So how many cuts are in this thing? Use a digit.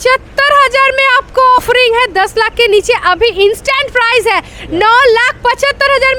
1